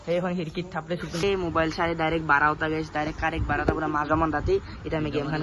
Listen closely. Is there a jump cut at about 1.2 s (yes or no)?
yes